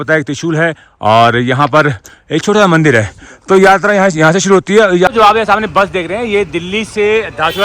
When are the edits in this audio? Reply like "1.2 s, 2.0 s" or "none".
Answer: 5.1 s